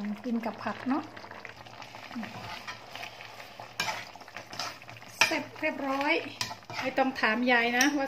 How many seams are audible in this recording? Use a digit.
2